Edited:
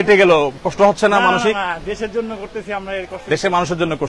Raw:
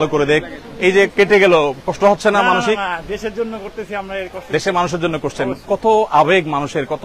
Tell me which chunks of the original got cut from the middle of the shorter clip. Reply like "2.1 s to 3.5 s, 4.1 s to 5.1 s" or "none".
none